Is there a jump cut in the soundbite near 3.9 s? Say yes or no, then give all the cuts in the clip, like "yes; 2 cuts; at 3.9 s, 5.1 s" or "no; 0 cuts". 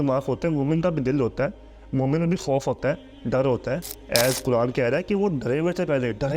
yes; 1 cut; at 3.9 s